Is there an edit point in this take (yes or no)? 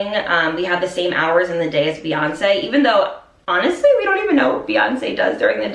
no